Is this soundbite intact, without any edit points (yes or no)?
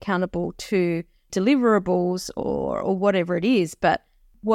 yes